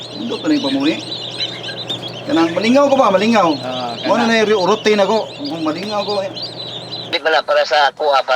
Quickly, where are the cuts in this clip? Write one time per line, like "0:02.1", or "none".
0:07.1

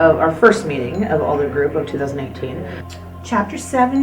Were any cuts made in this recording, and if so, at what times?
0:02.6

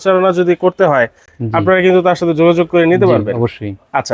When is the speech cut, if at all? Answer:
none

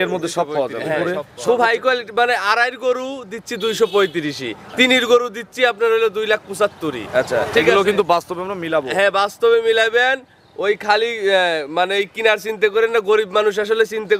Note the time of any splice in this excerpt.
0:01.2

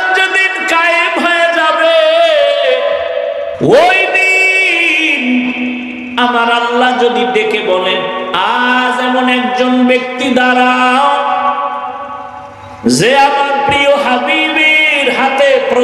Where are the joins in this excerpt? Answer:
0:03.5

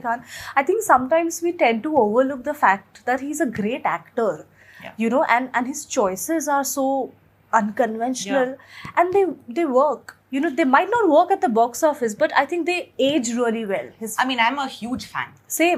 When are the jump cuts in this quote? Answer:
none

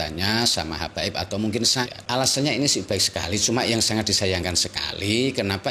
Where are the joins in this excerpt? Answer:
0:01.8

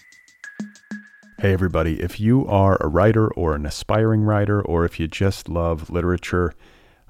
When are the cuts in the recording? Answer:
0:00.9

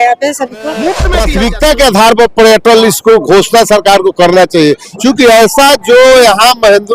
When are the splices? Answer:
0:01.1

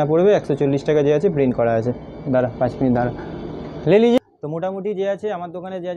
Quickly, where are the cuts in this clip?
none

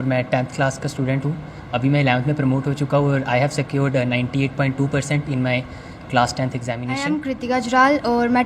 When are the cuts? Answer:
0:06.9

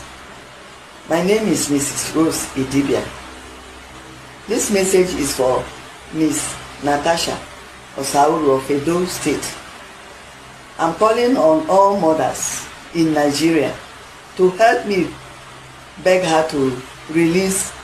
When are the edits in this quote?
none

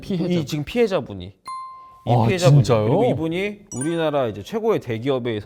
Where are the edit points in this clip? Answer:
none

